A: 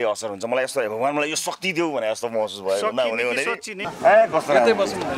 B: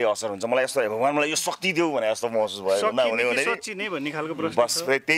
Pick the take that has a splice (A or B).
A